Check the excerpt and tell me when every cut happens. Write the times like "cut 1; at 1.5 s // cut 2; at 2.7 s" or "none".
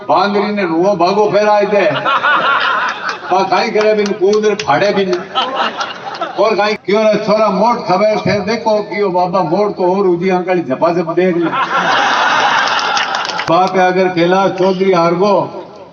cut 1; at 6.7 s // cut 2; at 13.5 s